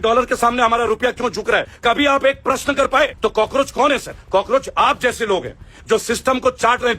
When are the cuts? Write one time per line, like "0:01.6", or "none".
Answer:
0:01.7
0:03.1
0:04.1